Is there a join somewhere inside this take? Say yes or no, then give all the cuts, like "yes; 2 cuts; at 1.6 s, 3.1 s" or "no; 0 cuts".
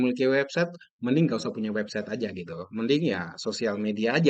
no; 0 cuts